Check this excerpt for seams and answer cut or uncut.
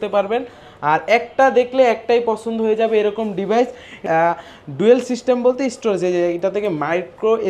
cut